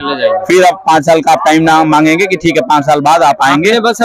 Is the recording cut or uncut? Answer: uncut